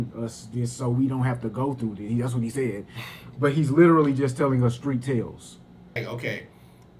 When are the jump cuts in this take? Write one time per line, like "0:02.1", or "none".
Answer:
0:06.0